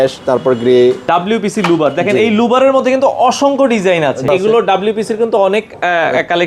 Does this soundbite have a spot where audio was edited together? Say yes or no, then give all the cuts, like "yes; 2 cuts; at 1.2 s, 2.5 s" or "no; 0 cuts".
yes; 2 cuts; at 1.0 s, 4.3 s